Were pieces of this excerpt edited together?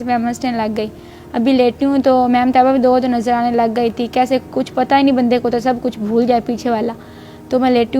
no; 0 cuts

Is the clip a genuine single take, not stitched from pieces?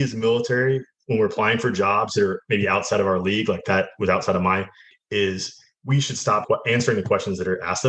no; 2 cuts; at 4.9 s, 6.4 s

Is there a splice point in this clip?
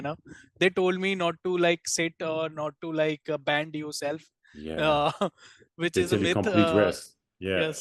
no; 0 cuts

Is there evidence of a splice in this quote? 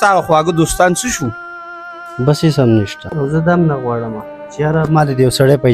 yes; 1 cut; at 3.0 s

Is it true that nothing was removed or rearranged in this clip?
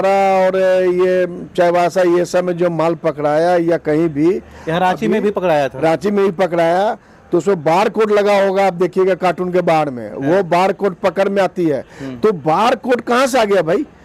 yes; 0 cuts

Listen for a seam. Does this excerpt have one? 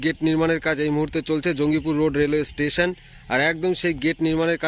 no; 0 cuts

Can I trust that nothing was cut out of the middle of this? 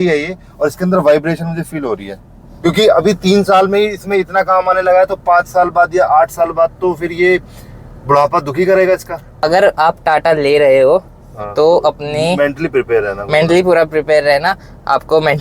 no; 2 cuts; at 2.4 s, 9.4 s

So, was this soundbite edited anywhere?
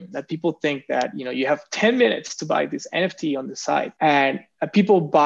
yes; 1 cut; at 3.9 s

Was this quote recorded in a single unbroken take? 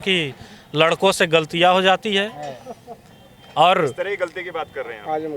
yes; 0 cuts

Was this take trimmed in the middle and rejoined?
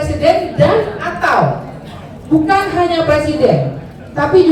no; 0 cuts

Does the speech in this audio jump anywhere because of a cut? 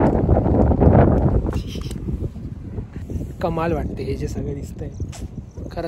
yes; 1 cut; at 3.1 s

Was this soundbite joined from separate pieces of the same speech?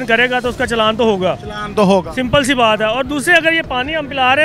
no; 0 cuts

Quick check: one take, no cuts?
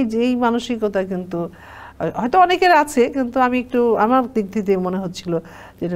yes; 0 cuts

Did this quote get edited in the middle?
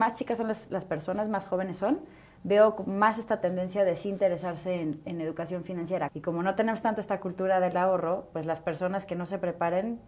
yes; 1 cut; at 6.1 s

